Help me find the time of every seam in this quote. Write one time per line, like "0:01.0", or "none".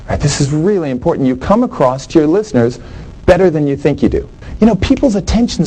0:04.4